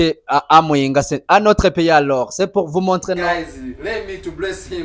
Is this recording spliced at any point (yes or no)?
yes